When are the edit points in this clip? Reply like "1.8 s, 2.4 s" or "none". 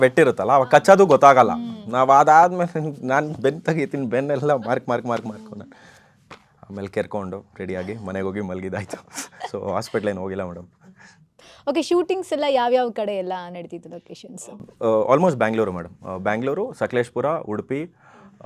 none